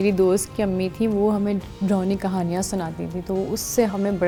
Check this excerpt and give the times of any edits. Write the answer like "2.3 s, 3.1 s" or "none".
none